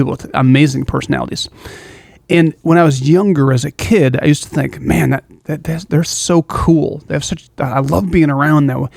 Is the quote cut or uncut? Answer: uncut